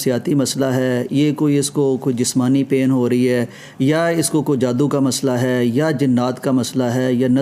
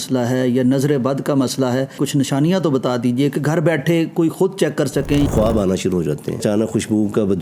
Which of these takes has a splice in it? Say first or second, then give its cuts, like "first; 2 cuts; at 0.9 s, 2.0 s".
second; 3 cuts; at 2.0 s, 5.3 s, 6.4 s